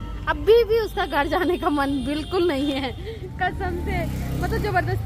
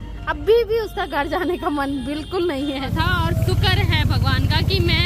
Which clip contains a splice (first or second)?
second